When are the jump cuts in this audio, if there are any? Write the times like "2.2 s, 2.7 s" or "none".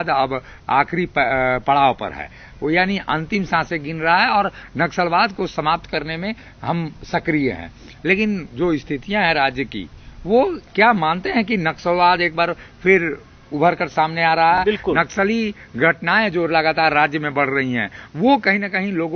none